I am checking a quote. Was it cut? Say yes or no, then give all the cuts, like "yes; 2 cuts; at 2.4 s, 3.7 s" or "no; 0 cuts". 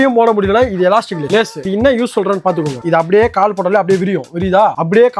yes; 2 cuts; at 1.6 s, 2.8 s